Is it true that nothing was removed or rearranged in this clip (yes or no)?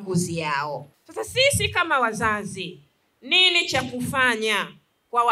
no